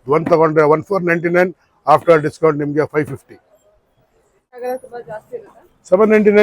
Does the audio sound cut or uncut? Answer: cut